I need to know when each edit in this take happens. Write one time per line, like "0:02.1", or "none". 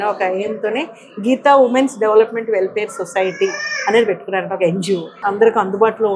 0:05.1